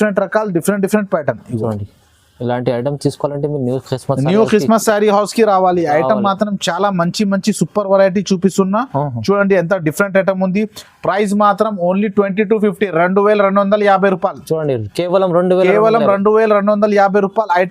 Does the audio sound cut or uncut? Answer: uncut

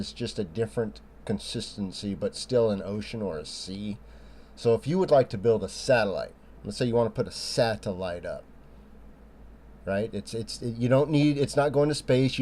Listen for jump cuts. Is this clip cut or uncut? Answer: cut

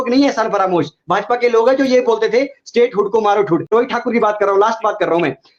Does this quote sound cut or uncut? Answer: cut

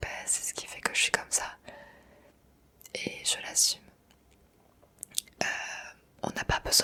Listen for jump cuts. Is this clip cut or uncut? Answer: uncut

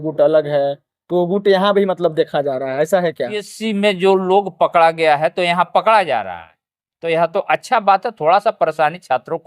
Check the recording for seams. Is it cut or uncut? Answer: cut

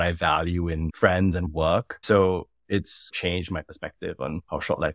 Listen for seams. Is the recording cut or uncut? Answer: cut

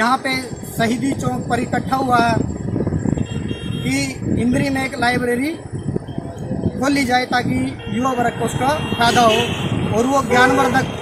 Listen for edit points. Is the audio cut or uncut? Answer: uncut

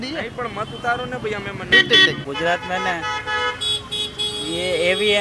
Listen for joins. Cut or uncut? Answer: cut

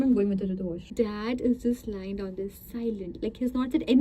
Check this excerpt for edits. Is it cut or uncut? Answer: cut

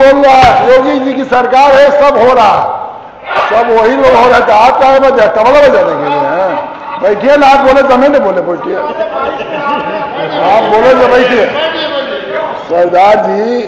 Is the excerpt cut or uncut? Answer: uncut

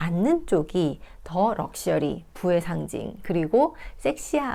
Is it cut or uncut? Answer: uncut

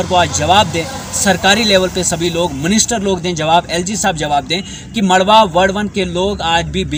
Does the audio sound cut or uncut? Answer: uncut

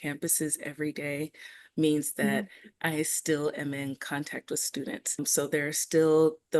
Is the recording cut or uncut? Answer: cut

